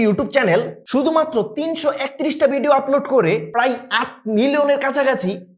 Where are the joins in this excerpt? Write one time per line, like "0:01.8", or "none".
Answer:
none